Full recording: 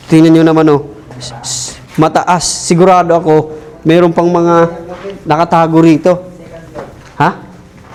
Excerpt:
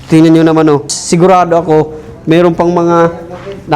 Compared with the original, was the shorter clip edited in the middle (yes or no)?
yes